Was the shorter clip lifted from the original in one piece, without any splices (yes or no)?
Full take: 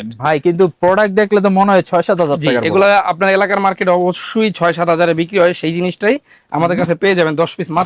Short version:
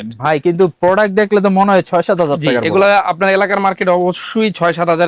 yes